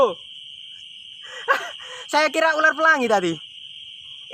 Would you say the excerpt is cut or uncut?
uncut